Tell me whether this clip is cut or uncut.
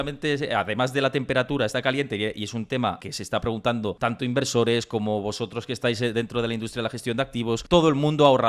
cut